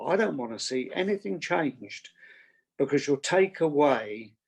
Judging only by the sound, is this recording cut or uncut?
uncut